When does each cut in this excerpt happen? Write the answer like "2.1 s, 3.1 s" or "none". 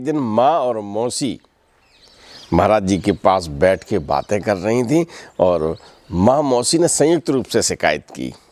none